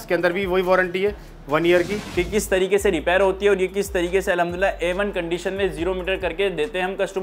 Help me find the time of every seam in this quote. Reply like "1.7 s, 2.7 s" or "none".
2.0 s